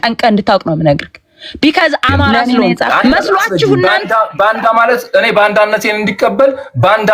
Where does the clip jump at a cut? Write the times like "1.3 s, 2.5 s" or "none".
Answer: 3.9 s

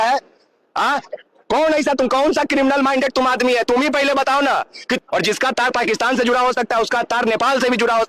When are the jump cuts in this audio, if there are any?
5.0 s

